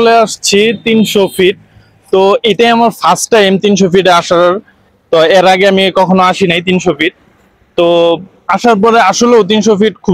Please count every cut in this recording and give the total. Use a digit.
0